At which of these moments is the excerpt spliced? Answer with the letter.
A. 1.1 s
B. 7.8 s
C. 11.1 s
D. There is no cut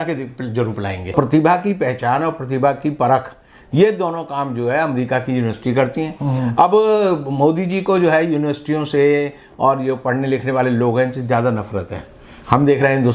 A